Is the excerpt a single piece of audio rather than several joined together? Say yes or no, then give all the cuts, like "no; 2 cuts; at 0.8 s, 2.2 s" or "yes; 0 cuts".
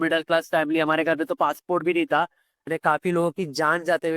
no; 1 cut; at 2.6 s